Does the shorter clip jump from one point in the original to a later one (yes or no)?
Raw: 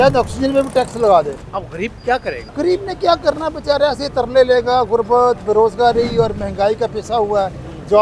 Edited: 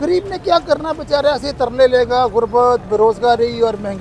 no